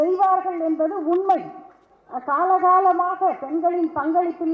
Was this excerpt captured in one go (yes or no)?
no